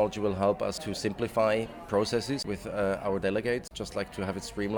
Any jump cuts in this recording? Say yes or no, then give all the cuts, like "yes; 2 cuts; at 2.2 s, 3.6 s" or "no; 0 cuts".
yes; 3 cuts; at 0.9 s, 2.5 s, 3.8 s